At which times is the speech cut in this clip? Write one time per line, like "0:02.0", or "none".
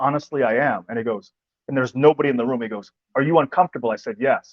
0:02.9